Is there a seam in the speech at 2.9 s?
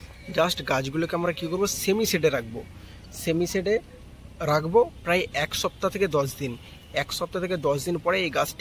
no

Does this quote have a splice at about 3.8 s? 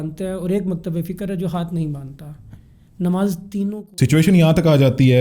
yes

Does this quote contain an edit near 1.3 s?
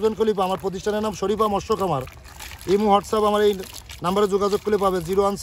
no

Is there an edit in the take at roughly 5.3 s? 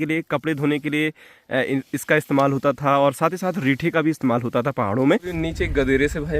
yes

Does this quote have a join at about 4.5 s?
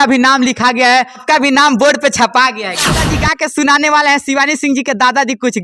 no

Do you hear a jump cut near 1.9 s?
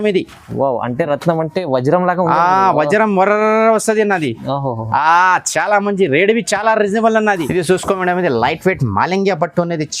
no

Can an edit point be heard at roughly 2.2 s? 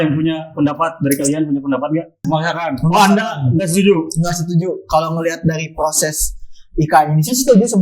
yes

